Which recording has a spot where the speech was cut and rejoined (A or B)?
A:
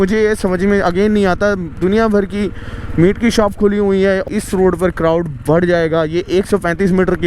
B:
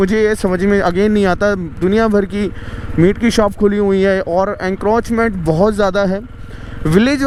A